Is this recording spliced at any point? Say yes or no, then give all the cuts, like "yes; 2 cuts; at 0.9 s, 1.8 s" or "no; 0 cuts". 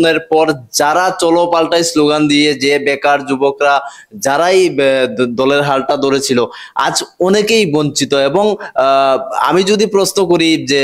no; 0 cuts